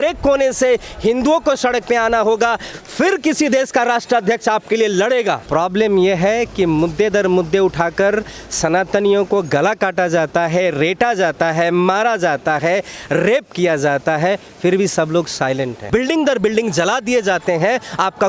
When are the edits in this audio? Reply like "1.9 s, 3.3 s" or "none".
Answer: 5.4 s, 15.8 s

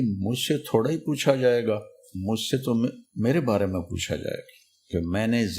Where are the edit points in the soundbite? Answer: 3.0 s

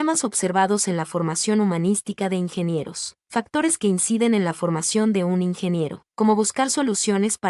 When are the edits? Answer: 3.1 s, 6.0 s

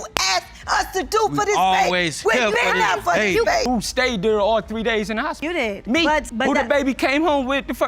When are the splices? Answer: 3.6 s

